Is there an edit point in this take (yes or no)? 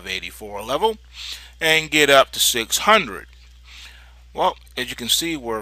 yes